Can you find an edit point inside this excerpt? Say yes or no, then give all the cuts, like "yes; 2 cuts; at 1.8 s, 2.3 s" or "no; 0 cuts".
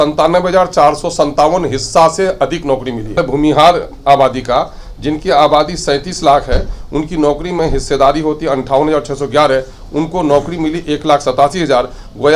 yes; 1 cut; at 3.2 s